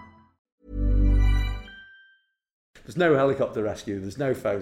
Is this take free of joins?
no; 1 cut; at 2.8 s

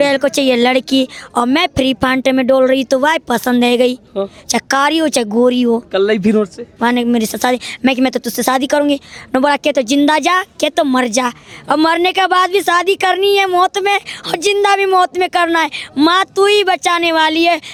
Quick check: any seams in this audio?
no; 0 cuts

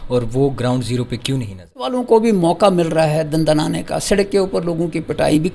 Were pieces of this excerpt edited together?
yes; 1 cut; at 1.9 s

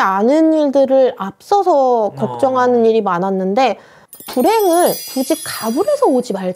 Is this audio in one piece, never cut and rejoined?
yes; 0 cuts

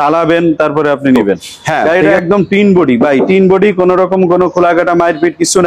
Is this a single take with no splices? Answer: no; 1 cut; at 1.9 s

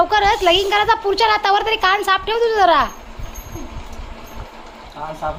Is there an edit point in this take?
no; 0 cuts

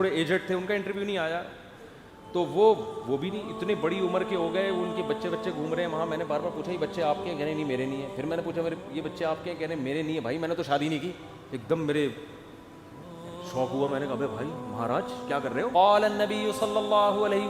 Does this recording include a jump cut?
yes; 1 cut; at 15.7 s

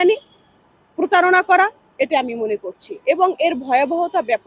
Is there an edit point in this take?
no; 0 cuts

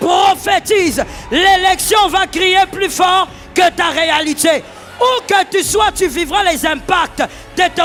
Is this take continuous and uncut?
yes; 0 cuts

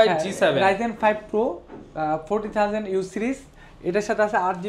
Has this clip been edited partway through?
no; 0 cuts

